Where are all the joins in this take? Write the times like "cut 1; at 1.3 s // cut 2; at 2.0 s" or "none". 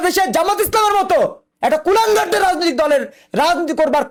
none